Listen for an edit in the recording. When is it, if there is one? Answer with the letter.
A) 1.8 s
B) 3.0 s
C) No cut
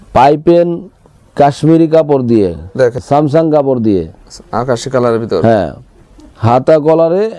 B